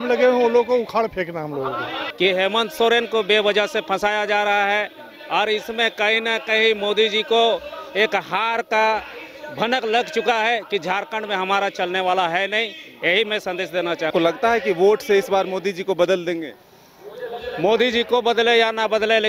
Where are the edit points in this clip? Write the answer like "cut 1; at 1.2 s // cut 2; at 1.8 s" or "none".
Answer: none